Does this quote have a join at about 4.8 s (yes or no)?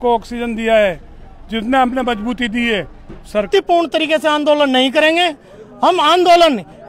no